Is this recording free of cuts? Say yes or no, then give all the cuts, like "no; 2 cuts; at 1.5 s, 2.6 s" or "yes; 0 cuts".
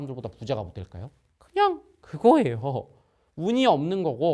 yes; 0 cuts